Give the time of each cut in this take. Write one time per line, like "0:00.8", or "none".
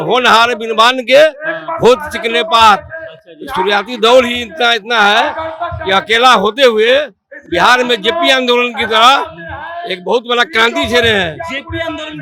none